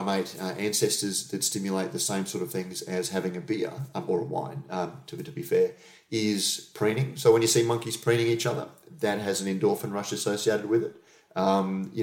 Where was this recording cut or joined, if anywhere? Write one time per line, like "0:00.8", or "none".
none